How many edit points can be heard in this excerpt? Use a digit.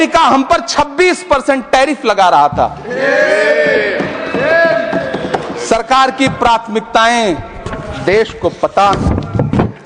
0